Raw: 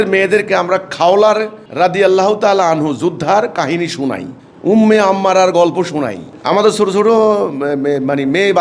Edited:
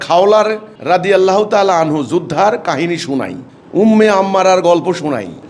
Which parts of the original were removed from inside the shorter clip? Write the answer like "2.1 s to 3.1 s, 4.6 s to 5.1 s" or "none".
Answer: none